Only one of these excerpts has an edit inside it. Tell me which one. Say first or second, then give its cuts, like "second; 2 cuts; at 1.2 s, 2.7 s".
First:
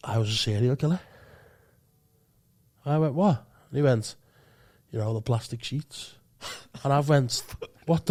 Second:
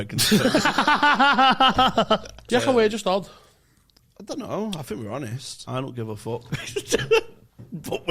second; 2 cuts; at 2.3 s, 5.6 s